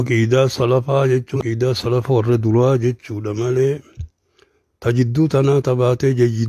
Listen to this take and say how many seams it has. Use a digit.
1